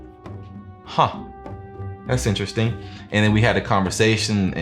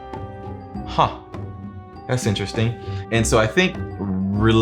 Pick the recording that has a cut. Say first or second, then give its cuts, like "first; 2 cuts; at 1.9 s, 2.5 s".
second; 1 cut; at 2.9 s